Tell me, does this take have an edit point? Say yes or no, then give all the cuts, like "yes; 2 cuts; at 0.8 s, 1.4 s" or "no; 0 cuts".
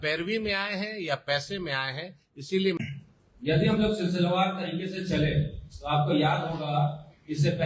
yes; 1 cut; at 2.8 s